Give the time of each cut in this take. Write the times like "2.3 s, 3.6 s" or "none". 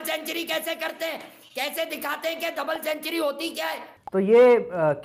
3.9 s